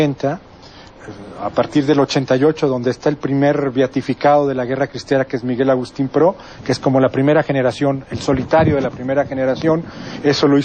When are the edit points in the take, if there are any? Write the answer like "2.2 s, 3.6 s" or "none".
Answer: 5.4 s